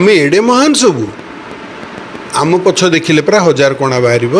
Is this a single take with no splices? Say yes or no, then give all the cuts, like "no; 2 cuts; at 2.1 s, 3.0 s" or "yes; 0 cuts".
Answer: yes; 0 cuts